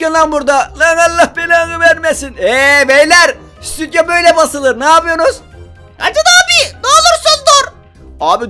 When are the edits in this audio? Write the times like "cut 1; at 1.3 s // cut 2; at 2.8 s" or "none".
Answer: none

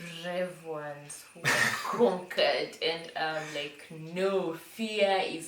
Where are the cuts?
none

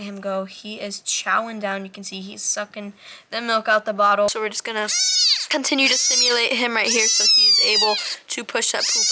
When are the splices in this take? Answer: cut 1; at 4.3 s

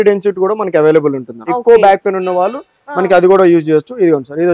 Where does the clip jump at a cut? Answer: cut 1; at 1.3 s

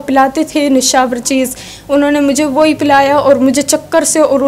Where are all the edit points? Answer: none

